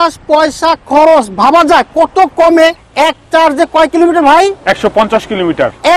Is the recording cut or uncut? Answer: cut